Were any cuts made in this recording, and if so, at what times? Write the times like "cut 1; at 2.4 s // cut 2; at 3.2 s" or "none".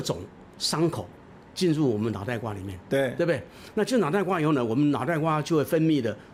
none